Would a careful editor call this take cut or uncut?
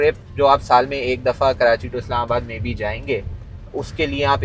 uncut